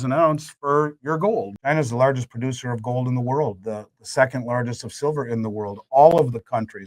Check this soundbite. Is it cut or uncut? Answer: cut